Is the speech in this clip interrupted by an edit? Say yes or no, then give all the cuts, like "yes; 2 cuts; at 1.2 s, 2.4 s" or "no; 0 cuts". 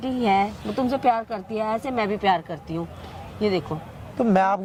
no; 0 cuts